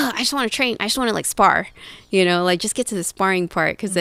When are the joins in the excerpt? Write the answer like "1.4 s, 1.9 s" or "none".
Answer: none